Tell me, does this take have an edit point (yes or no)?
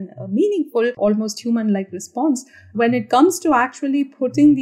yes